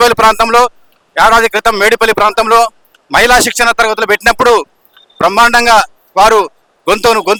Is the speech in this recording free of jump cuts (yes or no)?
yes